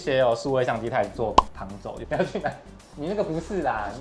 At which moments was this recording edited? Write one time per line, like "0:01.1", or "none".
0:02.0